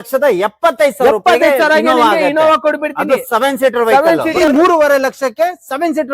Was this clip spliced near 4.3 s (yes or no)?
yes